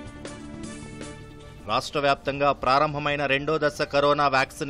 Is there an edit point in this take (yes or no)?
yes